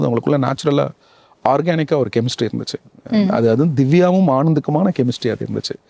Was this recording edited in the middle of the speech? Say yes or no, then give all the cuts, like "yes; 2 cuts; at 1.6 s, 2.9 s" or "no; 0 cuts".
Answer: no; 0 cuts